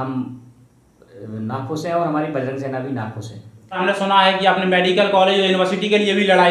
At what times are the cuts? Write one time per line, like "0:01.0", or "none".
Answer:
0:03.8